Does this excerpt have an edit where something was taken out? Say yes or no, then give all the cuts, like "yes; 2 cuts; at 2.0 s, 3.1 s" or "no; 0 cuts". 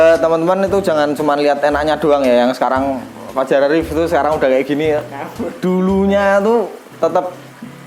no; 0 cuts